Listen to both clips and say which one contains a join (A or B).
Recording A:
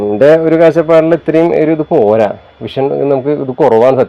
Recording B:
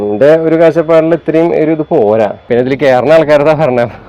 B